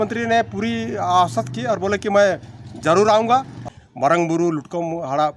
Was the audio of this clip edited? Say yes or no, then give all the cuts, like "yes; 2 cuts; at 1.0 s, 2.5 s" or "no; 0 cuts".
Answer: yes; 1 cut; at 3.6 s